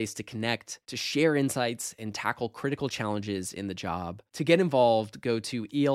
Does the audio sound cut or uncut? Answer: uncut